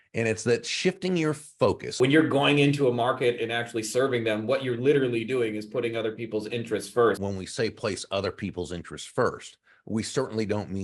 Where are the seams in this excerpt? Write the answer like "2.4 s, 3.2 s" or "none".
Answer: 1.9 s, 7.2 s